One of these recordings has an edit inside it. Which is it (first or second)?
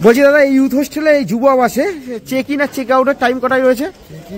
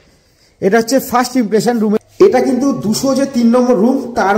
second